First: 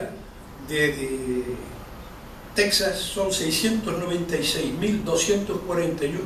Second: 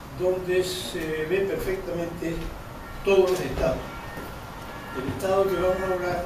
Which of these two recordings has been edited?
first; 1 cut; at 3.9 s

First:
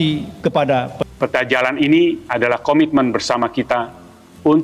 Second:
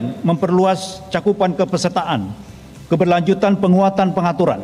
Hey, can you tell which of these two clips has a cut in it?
first; 1 cut; at 1.0 s

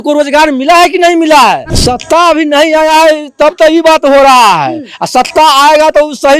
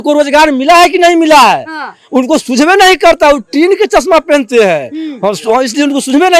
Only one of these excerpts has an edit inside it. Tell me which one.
first; 1 cut; at 1.7 s

